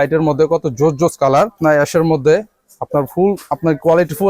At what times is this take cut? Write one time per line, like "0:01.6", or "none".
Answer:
0:01.6